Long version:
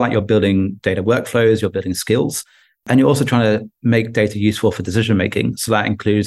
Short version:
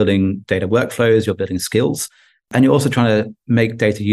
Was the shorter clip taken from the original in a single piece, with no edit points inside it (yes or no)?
yes